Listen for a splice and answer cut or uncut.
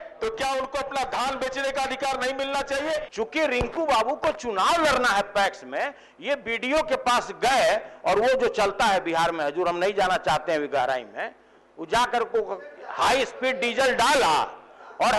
cut